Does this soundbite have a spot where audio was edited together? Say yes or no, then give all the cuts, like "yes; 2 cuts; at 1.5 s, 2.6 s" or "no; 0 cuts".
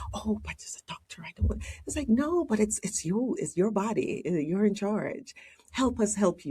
yes; 1 cut; at 3.4 s